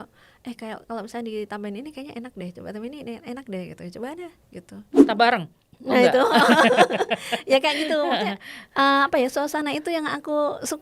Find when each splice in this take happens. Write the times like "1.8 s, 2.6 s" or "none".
4.9 s